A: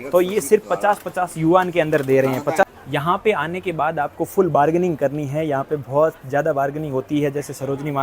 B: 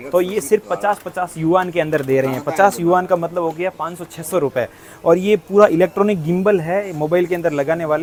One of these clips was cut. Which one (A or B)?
A